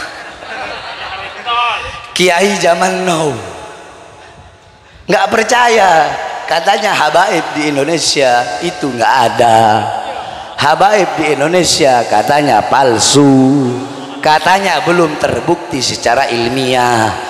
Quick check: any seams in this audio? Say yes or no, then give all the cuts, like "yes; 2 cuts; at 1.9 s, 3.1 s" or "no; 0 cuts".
no; 0 cuts